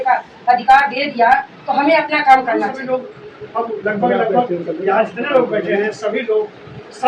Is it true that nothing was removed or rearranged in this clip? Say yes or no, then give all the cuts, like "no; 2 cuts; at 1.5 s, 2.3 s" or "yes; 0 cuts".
no; 1 cut; at 2.8 s